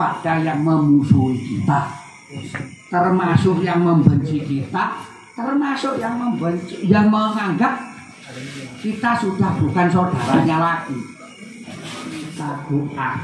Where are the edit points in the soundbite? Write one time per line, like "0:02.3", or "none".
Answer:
0:12.3